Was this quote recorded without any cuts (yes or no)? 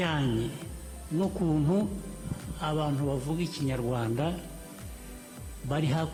yes